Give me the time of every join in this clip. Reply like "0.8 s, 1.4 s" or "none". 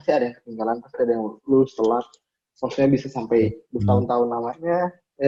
none